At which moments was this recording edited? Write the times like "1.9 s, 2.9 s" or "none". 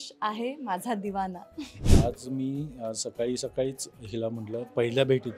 1.9 s